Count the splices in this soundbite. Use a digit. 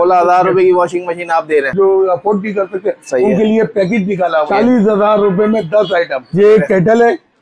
3